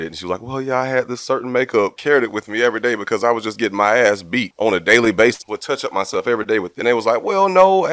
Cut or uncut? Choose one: cut